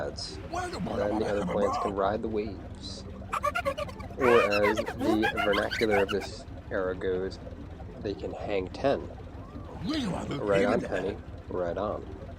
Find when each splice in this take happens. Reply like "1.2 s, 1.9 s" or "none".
5.6 s